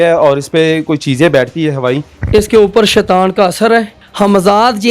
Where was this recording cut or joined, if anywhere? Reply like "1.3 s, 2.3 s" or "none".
2.2 s, 4.0 s